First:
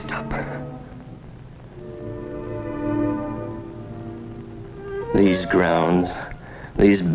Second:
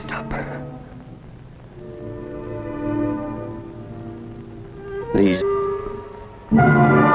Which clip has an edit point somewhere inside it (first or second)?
first